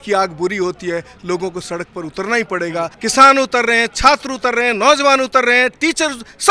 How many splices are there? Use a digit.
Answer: 1